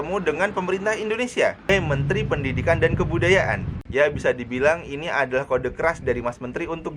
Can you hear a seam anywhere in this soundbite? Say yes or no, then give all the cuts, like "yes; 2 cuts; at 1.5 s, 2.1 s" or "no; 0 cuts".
yes; 2 cuts; at 1.7 s, 3.8 s